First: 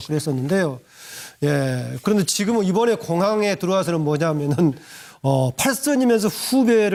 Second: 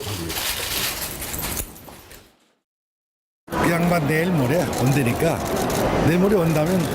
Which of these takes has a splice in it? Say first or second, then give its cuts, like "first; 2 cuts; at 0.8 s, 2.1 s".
second; 1 cut; at 4.8 s